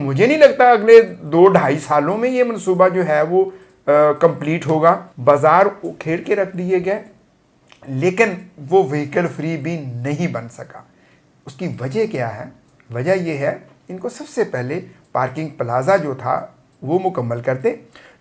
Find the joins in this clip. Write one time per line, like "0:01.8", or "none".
0:05.1